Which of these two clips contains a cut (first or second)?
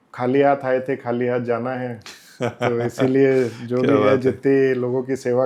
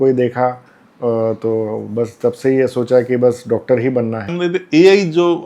second